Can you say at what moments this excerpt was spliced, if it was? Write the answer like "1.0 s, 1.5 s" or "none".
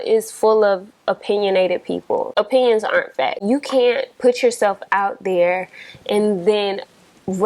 2.3 s, 3.4 s